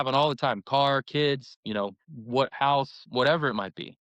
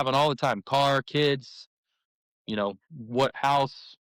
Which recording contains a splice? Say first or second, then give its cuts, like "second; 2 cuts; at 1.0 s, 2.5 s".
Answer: first; 2 cuts; at 1.5 s, 3.0 s